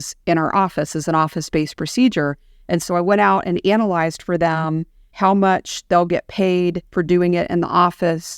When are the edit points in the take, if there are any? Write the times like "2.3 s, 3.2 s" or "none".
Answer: 6.8 s